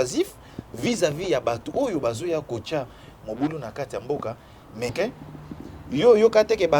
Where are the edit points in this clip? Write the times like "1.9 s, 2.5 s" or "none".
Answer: 4.9 s